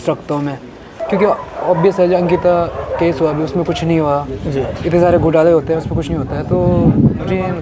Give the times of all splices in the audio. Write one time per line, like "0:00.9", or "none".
0:01.0